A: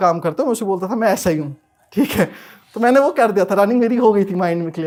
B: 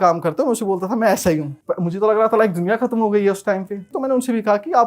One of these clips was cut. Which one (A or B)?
B